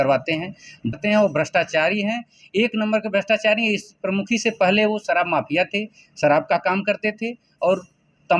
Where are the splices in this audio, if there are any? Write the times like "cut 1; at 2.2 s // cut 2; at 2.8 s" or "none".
cut 1; at 0.9 s